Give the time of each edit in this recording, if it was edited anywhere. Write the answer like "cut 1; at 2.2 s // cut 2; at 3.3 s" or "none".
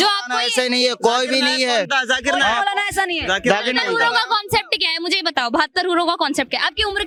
none